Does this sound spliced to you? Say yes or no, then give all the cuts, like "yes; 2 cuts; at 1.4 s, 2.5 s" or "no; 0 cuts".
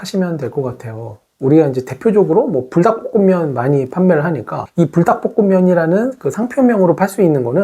no; 0 cuts